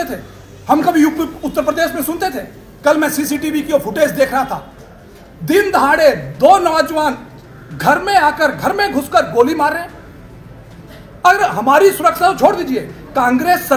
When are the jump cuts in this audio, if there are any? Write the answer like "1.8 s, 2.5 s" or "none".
none